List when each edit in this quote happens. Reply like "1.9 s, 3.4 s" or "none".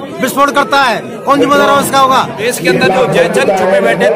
2.4 s